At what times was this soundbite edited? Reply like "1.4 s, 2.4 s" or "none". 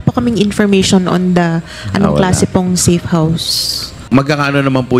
4.1 s